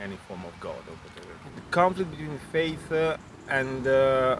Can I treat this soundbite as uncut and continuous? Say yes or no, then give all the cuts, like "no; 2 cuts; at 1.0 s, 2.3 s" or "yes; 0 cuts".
no; 1 cut; at 1.4 s